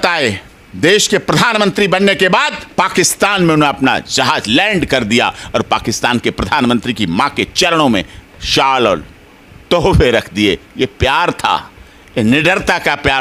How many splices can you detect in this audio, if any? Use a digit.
0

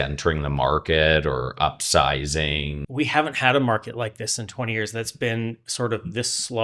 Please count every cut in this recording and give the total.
1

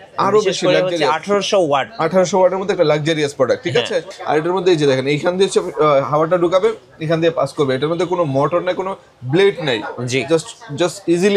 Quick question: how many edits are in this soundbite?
1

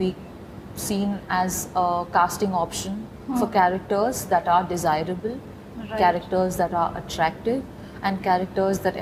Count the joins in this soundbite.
0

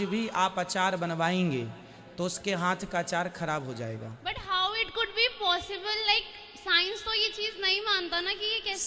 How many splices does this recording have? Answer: 0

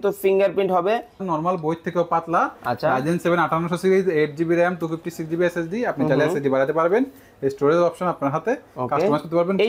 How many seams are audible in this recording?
1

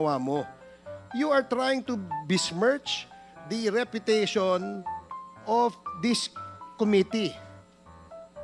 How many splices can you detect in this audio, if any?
1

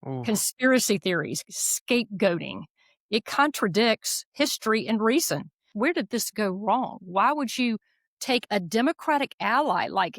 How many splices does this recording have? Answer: 1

